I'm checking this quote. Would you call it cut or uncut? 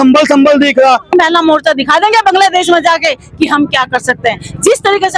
cut